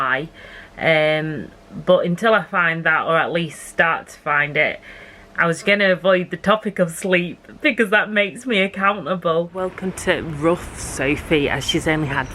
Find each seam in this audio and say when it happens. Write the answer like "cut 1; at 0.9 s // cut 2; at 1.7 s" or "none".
cut 1; at 9.6 s